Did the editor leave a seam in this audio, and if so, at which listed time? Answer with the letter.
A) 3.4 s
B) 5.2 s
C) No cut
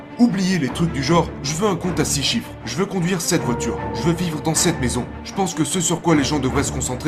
B